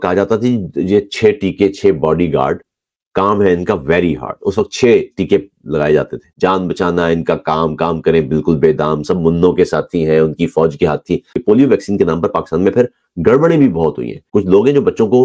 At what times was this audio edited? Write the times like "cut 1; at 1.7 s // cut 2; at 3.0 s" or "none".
cut 1; at 6.2 s // cut 2; at 11.3 s // cut 3; at 14.1 s

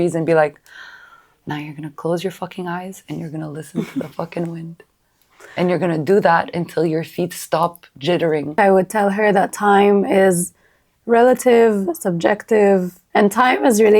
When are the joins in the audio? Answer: cut 1; at 8.6 s // cut 2; at 13.0 s

